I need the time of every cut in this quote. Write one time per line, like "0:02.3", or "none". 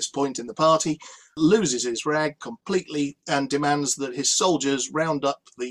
0:01.4